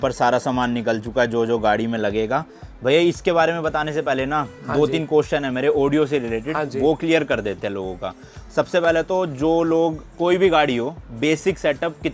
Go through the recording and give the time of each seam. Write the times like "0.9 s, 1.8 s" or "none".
none